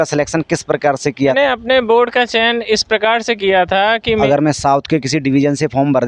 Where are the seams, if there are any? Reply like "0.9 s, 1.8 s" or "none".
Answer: 1.3 s, 4.2 s